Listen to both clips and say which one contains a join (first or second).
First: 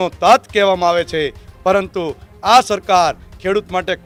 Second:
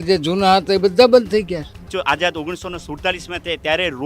second